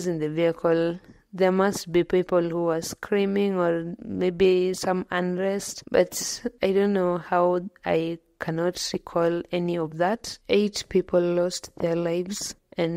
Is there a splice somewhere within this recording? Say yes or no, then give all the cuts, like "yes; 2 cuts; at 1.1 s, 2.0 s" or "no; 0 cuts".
yes; 2 cuts; at 5.7 s, 10.3 s